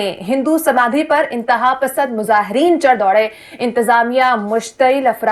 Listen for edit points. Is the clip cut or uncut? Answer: uncut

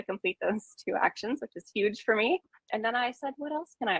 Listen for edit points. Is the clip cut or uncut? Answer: uncut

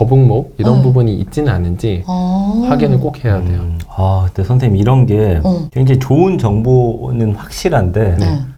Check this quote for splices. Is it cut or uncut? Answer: uncut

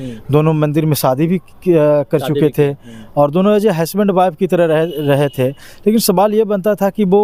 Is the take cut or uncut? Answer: uncut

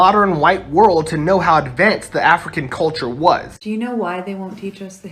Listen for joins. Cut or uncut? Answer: cut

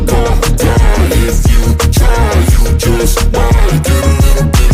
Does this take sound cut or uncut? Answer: uncut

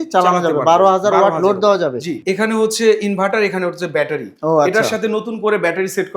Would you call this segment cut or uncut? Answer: cut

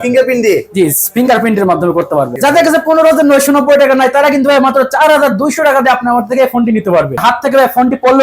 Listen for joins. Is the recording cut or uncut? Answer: cut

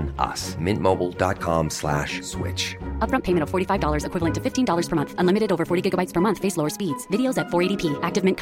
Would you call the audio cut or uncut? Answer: uncut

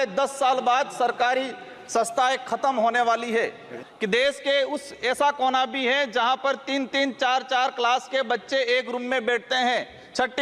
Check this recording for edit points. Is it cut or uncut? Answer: cut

